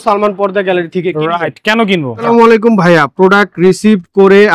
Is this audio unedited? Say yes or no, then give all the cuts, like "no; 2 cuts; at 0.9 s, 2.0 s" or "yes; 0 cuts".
no; 1 cut; at 2.3 s